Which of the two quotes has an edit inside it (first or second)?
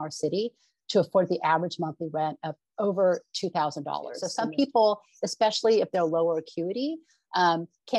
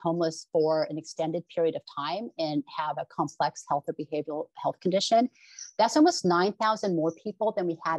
first